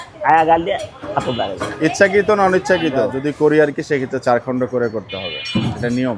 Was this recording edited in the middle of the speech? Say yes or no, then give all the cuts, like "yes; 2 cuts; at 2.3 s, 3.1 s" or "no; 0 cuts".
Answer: yes; 1 cut; at 3.1 s